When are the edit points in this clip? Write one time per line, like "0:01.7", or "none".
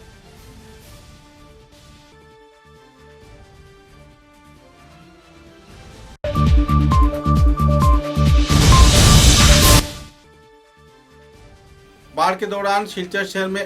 0:06.1
0:09.8